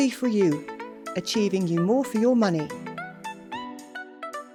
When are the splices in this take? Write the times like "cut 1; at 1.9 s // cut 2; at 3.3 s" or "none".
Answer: none

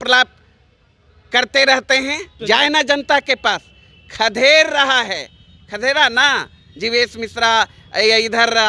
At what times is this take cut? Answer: cut 1; at 2.3 s

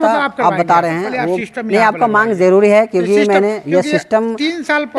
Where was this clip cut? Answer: cut 1; at 1.4 s

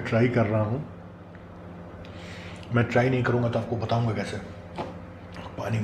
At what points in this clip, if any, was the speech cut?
cut 1; at 1.2 s

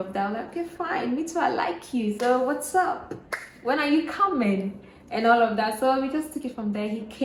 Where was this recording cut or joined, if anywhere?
none

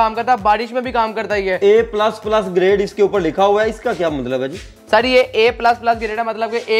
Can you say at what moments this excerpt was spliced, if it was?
none

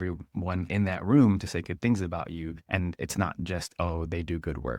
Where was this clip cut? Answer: cut 1; at 2.6 s

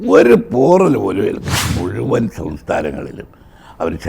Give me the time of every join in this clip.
cut 1; at 1.6 s

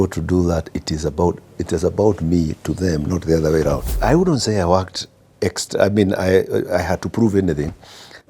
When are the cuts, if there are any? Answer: cut 1; at 4.0 s

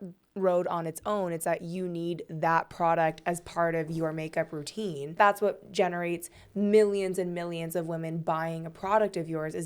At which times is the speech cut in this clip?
cut 1; at 5.1 s

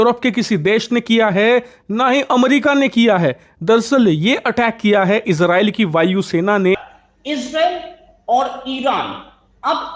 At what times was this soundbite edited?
cut 1; at 6.8 s

